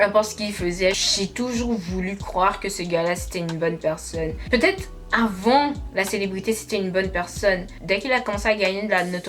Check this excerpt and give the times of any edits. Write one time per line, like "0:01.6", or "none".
0:01.0
0:04.4